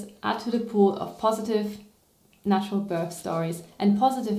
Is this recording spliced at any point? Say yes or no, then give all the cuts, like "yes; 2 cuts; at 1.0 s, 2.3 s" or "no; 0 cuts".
no; 0 cuts